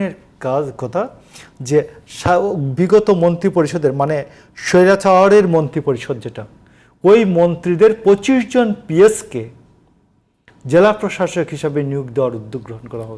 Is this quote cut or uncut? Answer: uncut